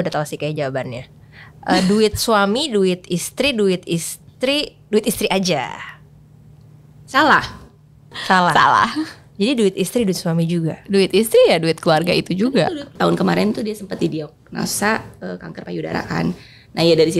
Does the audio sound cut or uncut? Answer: cut